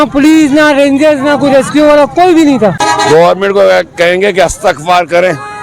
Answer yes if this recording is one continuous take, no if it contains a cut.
no